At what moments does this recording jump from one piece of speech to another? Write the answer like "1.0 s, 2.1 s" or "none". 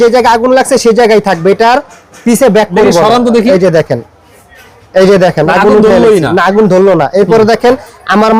none